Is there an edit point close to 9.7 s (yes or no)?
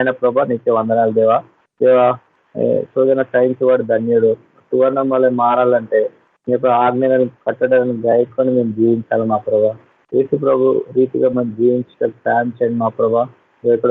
no